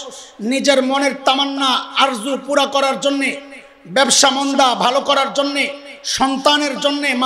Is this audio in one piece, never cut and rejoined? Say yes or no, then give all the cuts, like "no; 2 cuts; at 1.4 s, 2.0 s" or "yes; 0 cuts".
yes; 0 cuts